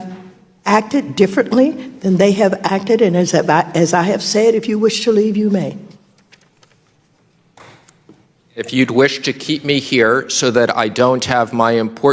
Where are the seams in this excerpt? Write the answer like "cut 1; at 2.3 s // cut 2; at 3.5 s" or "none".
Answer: none